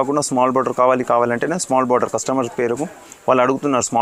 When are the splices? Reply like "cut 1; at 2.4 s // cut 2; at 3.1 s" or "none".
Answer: none